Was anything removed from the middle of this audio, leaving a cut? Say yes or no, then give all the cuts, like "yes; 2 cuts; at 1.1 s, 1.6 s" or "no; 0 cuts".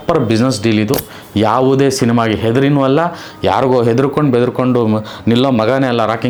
no; 0 cuts